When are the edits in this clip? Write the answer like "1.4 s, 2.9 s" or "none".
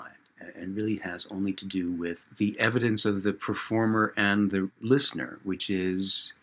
2.3 s, 4.8 s